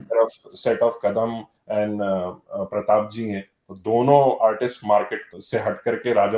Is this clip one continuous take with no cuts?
no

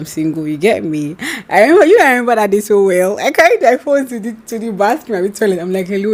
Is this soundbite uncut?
yes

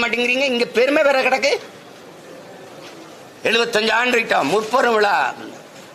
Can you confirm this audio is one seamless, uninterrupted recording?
yes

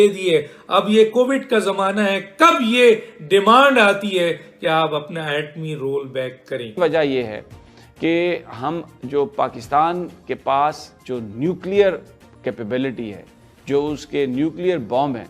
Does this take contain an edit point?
yes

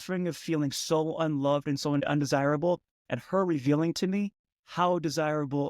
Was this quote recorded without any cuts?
yes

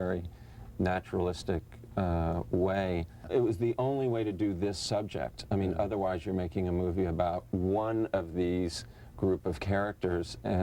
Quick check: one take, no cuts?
no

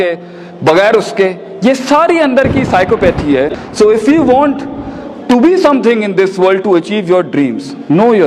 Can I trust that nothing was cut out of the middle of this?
no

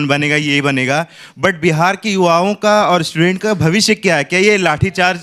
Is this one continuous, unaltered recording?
yes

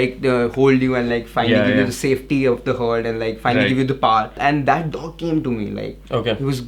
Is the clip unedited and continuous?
no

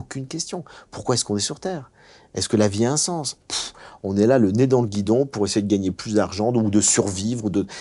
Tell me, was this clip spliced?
no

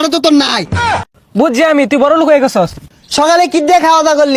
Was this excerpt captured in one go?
no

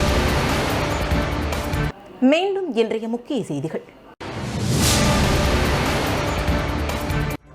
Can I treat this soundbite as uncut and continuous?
yes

